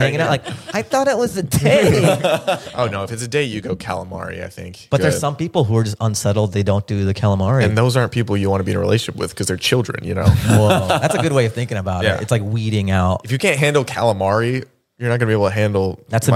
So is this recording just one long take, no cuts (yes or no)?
no